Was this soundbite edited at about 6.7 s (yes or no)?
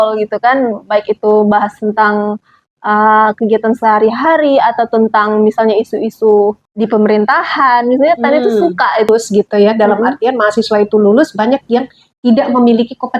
yes